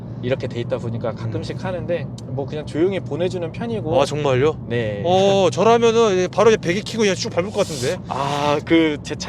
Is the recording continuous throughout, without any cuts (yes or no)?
yes